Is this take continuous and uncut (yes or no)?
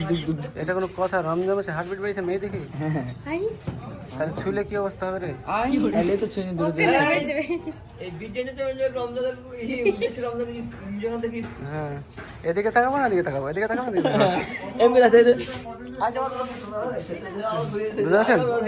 yes